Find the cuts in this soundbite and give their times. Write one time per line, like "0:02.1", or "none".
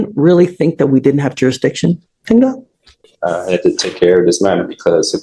none